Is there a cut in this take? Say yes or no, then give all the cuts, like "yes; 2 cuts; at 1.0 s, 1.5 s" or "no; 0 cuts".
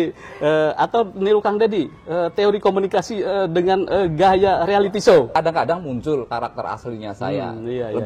yes; 1 cut; at 5.3 s